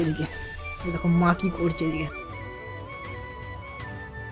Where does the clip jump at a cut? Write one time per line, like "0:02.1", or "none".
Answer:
none